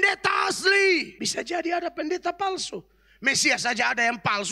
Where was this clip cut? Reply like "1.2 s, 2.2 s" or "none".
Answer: 1.2 s